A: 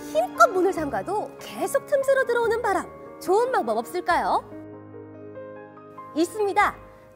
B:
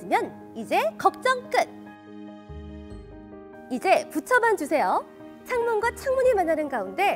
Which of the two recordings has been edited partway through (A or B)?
B